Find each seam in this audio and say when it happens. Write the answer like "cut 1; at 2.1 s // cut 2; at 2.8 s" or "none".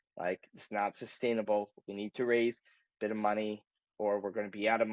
none

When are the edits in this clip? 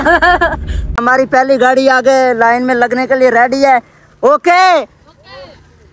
cut 1; at 1.0 s

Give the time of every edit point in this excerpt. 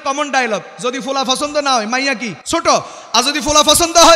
cut 1; at 2.3 s

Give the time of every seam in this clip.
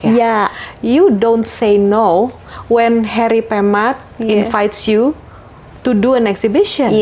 none

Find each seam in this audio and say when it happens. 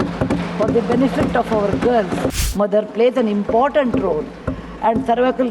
cut 1; at 2.4 s

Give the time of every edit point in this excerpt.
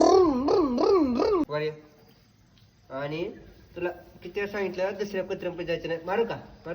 cut 1; at 1.4 s

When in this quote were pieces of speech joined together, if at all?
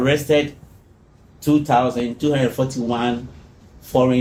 none

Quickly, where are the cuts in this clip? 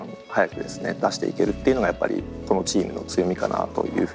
none

